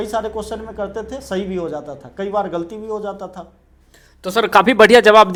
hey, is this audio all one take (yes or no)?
yes